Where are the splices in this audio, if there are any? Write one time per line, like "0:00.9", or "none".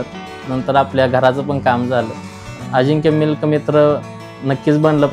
0:02.6